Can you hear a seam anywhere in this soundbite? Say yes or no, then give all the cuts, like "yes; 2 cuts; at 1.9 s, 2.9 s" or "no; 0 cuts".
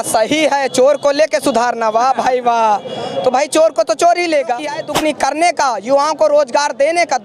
yes; 1 cut; at 4.8 s